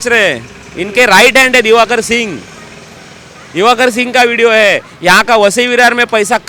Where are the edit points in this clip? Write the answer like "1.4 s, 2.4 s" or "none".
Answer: none